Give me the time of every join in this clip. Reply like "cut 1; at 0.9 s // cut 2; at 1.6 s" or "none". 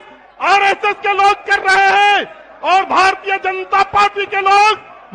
none